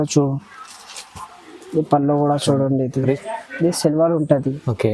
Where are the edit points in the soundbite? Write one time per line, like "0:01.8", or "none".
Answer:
0:03.2